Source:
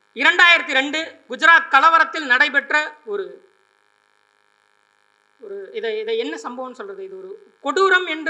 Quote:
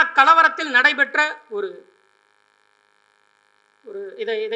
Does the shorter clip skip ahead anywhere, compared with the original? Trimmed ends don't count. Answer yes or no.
no